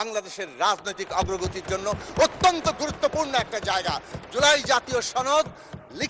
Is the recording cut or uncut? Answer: uncut